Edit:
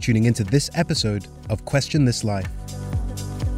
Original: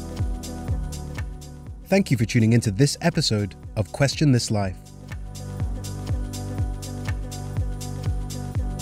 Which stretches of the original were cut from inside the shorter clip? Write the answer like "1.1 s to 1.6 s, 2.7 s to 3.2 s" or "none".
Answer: 4.8 s to 5.2 s